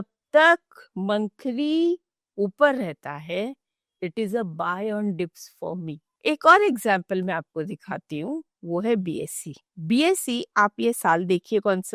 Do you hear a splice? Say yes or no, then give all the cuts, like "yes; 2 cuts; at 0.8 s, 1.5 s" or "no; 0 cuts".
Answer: no; 0 cuts